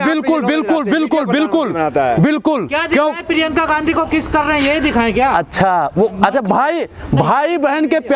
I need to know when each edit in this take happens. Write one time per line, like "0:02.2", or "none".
none